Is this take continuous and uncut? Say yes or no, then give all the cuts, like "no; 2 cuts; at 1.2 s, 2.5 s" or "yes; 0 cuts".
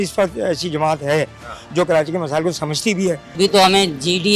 no; 1 cut; at 3.4 s